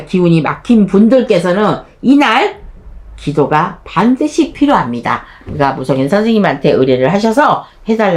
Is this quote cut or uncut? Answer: uncut